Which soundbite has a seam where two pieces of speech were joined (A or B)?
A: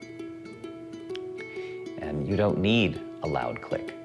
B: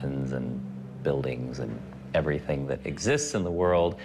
B